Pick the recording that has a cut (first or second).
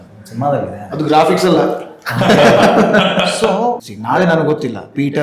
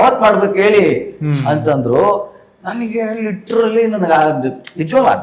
first